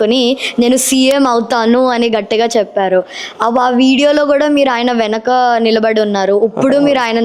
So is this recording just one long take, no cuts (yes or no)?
yes